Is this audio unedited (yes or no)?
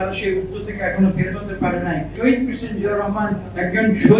no